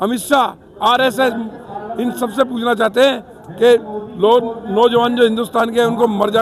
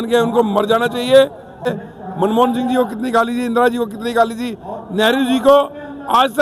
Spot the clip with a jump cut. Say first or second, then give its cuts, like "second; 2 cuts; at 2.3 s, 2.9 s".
second; 1 cut; at 1.7 s